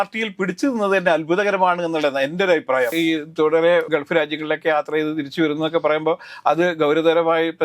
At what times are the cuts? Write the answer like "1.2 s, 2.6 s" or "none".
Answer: 2.9 s, 3.9 s